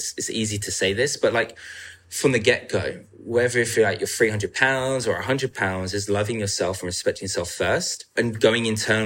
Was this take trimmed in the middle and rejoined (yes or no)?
yes